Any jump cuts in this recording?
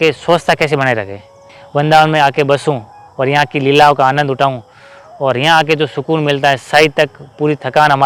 yes; 1 cut; at 1.6 s

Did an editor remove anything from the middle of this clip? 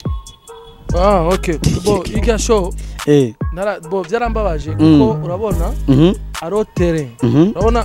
yes; 1 cut; at 0.9 s

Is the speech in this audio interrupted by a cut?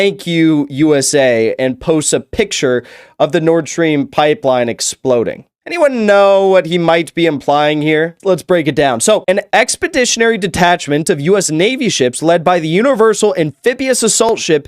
yes; 2 cuts; at 8.1 s, 9.4 s

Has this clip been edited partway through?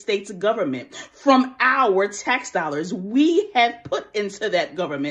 no; 0 cuts

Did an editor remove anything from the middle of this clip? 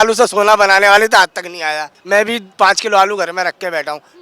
yes; 1 cut; at 1.9 s

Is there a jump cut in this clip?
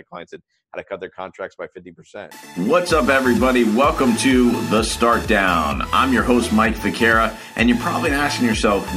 yes; 1 cut; at 2.4 s

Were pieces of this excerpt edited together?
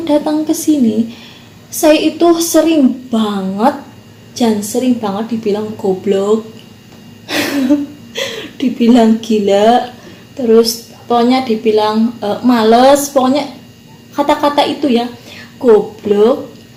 no; 0 cuts

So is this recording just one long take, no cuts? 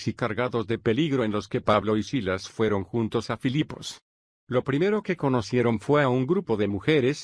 yes; 0 cuts

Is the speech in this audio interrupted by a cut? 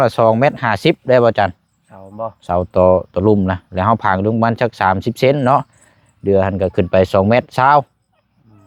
no; 0 cuts

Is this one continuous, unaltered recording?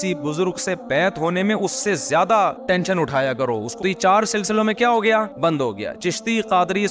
no; 1 cut; at 3.7 s

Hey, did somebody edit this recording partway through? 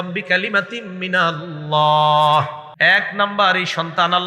yes; 1 cut; at 2.6 s

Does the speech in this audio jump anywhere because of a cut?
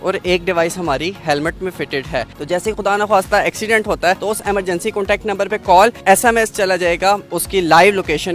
yes; 4 cuts; at 2.3 s, 4.2 s, 6.0 s, 7.3 s

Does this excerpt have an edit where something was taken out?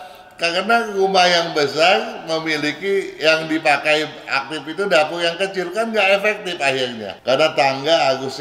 yes; 1 cut; at 7.1 s

